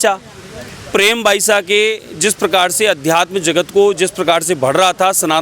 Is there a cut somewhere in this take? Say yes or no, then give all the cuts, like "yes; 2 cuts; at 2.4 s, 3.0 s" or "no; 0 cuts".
no; 0 cuts